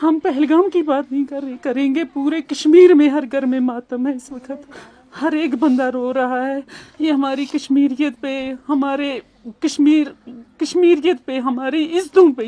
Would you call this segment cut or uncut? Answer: uncut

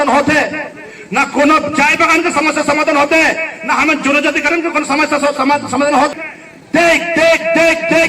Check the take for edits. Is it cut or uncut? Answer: cut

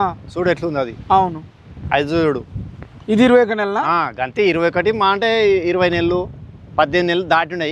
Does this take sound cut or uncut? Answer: uncut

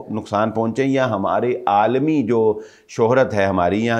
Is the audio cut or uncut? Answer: uncut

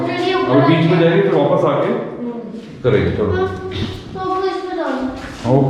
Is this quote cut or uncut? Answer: uncut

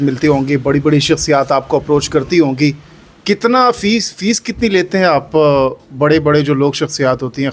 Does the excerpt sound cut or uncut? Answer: uncut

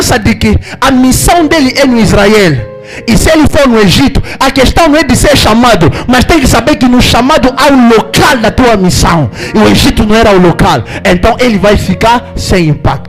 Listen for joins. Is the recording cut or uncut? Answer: uncut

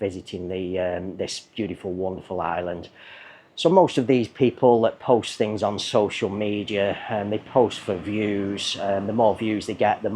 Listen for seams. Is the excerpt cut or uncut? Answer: uncut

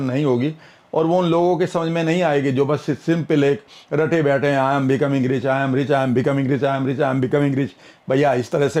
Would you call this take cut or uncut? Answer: uncut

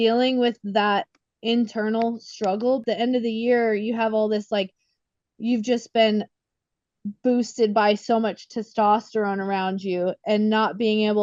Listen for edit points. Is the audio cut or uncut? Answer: cut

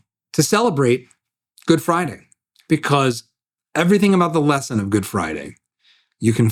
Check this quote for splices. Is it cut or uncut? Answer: uncut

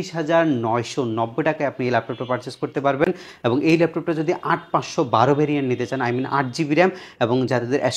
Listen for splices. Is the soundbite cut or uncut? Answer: uncut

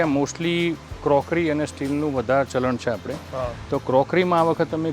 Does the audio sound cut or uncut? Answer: uncut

